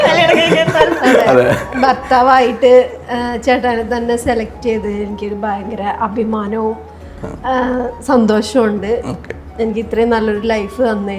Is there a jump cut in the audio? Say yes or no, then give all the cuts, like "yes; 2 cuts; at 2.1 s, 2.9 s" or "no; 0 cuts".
no; 0 cuts